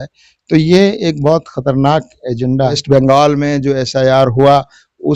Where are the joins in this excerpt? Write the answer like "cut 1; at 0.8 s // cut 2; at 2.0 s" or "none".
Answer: cut 1; at 2.8 s

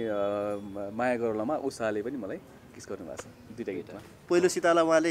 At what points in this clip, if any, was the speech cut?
cut 1; at 4.1 s

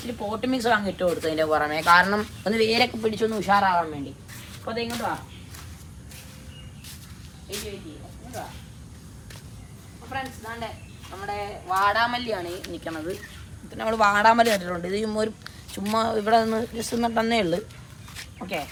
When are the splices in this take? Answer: none

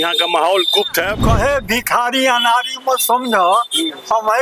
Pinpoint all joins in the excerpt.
cut 1; at 1.2 s

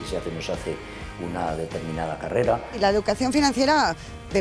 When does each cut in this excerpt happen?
cut 1; at 2.7 s

